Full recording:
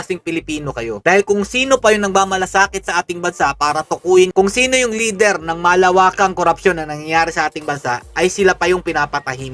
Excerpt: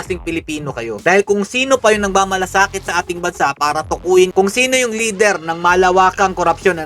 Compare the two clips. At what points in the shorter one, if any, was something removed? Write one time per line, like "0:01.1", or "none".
none